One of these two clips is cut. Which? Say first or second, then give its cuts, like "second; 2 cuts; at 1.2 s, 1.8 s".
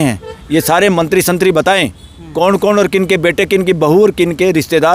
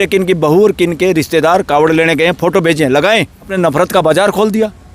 second; 1 cut; at 3.5 s